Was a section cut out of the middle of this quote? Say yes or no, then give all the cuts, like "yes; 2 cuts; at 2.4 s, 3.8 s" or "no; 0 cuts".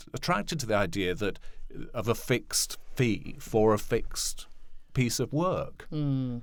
no; 0 cuts